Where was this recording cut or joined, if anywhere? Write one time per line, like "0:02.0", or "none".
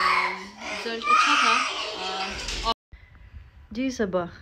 0:02.8